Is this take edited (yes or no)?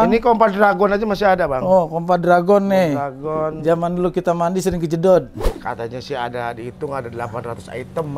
yes